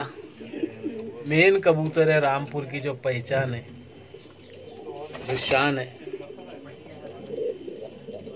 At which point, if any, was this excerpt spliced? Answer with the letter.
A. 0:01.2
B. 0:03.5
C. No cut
A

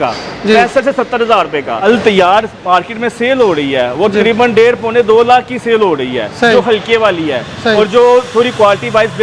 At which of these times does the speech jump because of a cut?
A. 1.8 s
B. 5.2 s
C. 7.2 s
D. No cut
A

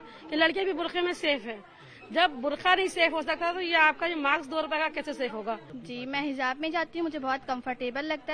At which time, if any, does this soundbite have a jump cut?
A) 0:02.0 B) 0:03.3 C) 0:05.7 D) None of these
C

